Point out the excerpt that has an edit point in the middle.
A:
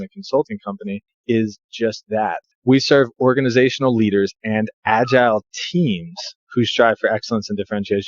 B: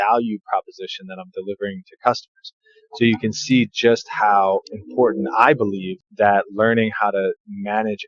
A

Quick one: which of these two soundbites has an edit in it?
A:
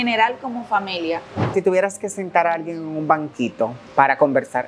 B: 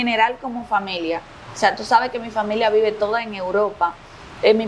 A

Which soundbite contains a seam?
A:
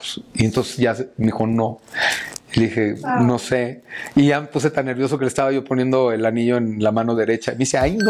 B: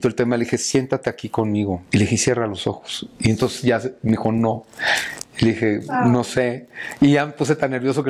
B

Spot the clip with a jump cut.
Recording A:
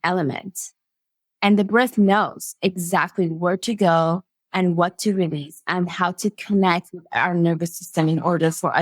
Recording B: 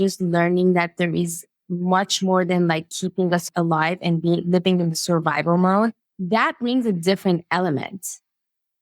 B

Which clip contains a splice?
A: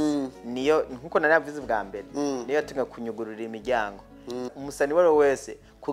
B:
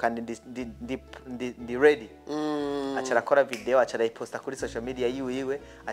A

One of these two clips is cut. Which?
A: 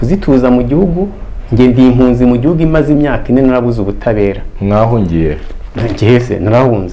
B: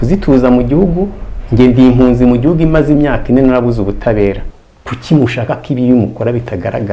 B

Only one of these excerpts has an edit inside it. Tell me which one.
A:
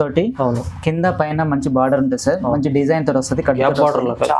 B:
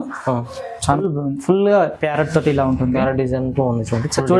B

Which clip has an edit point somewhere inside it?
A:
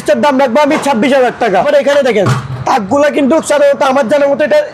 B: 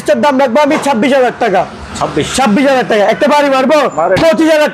A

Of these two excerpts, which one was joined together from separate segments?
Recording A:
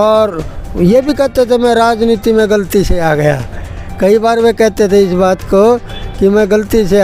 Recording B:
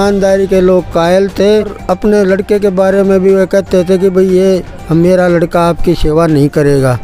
B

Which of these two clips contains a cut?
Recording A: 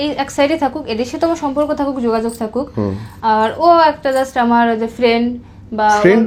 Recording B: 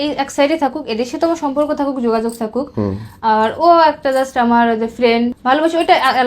B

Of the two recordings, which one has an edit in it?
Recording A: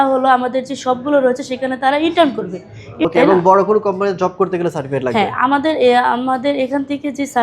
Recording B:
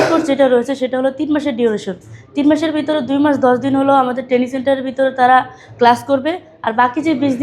A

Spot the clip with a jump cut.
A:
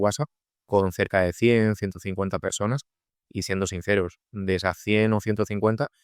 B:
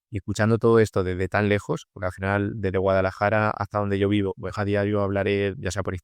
B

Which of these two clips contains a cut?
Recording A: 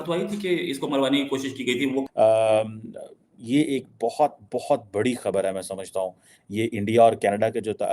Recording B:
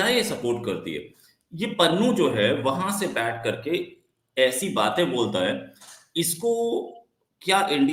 A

